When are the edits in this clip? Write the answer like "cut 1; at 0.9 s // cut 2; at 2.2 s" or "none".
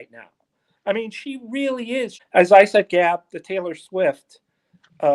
cut 1; at 2.2 s